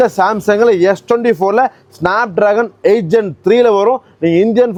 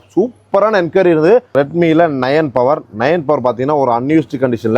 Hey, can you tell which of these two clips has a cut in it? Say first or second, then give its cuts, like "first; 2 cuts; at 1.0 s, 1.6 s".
second; 1 cut; at 1.5 s